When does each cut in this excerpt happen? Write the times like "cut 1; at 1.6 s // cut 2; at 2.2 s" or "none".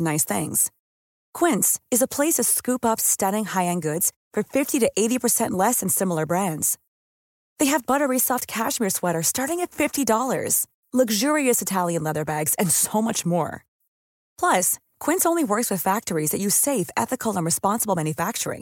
none